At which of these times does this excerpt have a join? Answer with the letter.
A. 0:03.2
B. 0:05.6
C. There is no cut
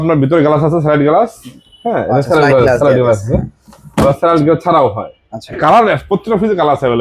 B